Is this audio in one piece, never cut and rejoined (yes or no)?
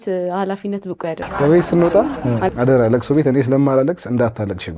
no